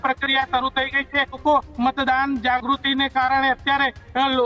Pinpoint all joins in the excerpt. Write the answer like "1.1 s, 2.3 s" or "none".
1.4 s